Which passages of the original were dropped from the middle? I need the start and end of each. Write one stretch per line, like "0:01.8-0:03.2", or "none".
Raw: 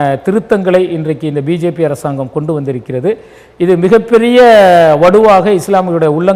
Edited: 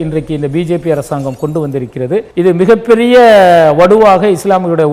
0:03.2-0:03.5